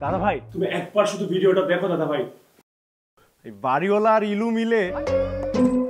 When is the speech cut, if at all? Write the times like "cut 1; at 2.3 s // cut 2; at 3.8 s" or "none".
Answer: cut 1; at 4.9 s